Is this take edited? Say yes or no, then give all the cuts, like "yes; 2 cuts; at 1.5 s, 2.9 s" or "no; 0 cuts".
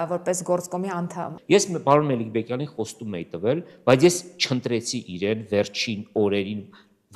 yes; 1 cut; at 1.3 s